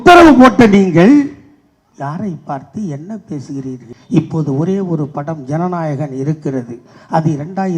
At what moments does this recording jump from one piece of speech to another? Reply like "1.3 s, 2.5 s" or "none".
3.9 s